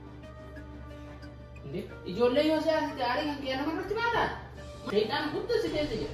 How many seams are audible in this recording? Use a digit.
1